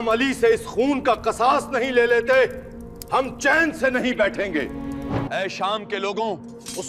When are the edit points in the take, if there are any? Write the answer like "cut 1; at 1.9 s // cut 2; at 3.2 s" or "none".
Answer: cut 1; at 5.3 s